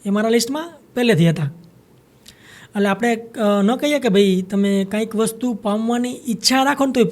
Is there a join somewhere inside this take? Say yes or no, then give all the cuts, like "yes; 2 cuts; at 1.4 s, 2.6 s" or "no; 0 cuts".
no; 0 cuts